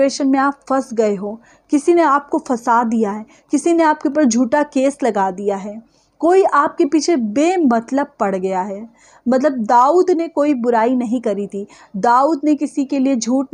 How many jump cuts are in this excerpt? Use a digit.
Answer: 0